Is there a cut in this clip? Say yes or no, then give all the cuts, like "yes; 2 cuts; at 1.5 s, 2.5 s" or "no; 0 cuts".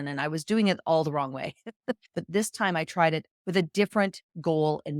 yes; 1 cut; at 2.2 s